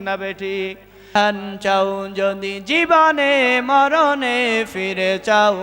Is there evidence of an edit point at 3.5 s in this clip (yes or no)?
no